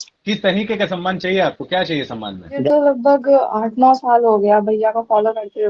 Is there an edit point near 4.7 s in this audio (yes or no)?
no